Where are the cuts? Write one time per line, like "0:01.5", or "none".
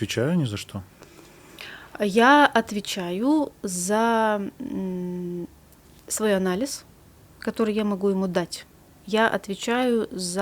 none